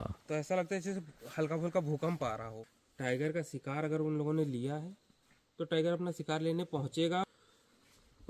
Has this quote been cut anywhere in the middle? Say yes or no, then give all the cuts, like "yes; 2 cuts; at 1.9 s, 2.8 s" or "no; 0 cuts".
yes; 2 cuts; at 2.5 s, 7.2 s